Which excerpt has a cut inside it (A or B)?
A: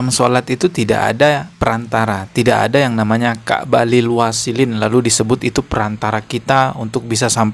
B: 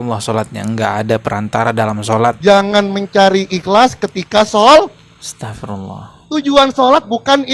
B